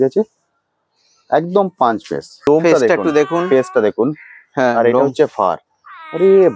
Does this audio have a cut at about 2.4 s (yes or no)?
yes